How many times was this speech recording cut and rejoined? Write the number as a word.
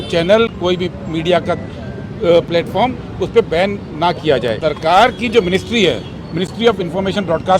one